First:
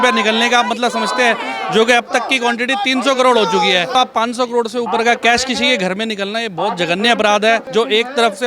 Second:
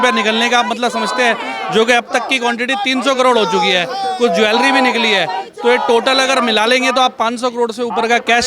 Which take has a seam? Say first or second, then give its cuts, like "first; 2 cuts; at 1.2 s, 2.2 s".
first; 2 cuts; at 3.9 s, 7.7 s